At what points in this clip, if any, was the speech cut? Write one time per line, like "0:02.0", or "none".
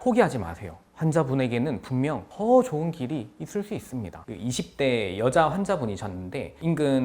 0:04.2